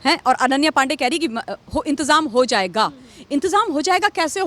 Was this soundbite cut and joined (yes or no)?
no